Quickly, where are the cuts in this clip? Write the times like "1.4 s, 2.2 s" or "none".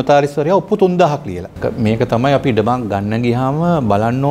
1.6 s